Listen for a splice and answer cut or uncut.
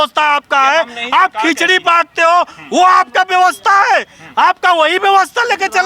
uncut